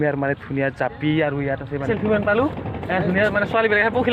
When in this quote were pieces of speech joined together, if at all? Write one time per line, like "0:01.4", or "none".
0:01.9